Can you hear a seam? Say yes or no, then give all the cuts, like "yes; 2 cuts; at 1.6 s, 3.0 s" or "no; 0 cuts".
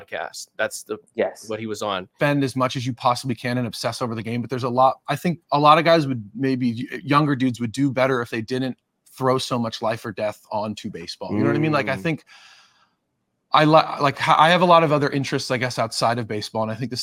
yes; 1 cut; at 2.1 s